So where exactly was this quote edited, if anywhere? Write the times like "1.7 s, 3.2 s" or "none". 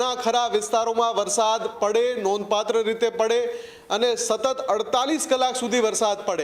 none